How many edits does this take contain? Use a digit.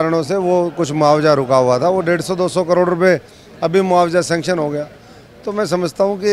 0